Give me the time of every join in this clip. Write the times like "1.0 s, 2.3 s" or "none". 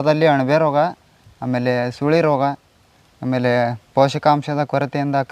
none